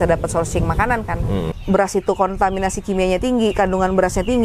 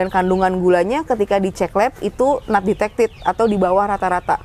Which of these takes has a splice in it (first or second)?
first